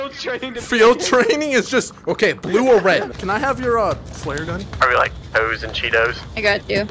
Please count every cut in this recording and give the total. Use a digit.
1